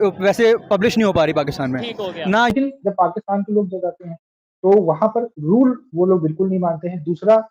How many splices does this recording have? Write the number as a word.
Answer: one